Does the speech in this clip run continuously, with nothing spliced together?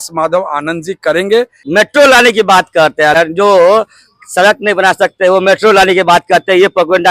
no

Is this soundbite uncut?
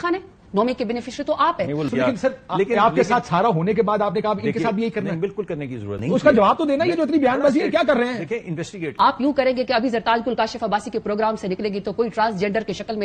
no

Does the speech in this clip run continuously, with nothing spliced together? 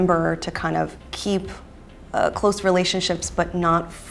yes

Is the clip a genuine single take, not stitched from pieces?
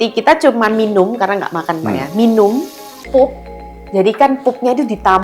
yes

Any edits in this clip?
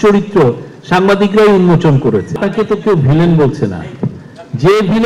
yes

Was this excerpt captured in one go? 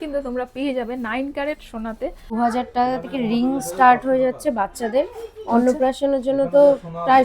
no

